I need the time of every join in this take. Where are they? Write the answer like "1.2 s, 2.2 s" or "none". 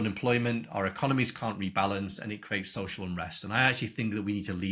none